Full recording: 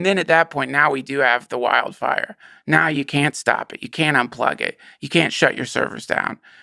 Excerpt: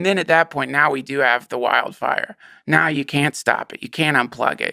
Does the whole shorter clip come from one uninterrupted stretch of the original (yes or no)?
yes